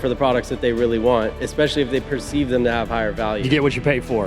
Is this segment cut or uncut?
uncut